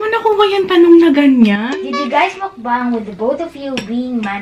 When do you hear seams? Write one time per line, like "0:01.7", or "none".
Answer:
0:01.7

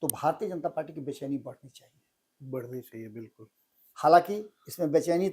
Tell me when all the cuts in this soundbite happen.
none

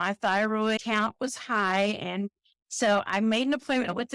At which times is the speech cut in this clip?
none

